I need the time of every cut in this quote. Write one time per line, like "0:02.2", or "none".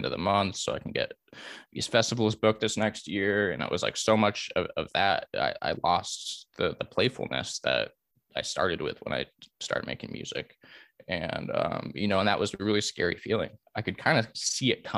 0:13.6

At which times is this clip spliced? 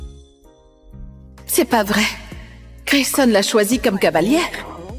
0:01.4

